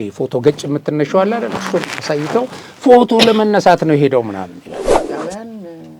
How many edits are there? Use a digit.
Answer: 1